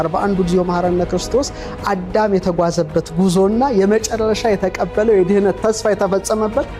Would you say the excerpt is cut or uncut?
uncut